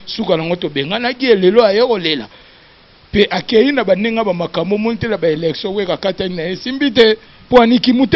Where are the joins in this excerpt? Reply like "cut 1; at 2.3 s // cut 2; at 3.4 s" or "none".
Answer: none